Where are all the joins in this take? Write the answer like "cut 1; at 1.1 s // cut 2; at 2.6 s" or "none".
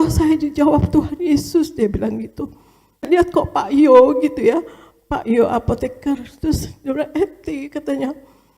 cut 1; at 3.1 s